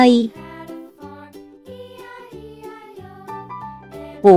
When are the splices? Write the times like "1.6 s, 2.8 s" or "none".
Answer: none